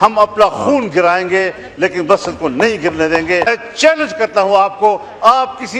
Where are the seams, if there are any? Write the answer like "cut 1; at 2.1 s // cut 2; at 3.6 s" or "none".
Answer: cut 1; at 3.5 s